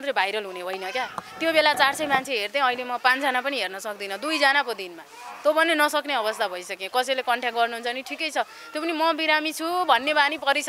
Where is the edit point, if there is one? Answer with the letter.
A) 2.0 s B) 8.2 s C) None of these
C